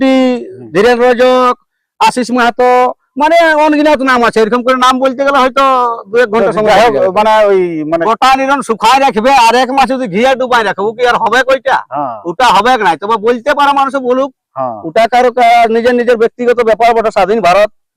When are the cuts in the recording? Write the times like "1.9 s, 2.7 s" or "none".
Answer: 8.0 s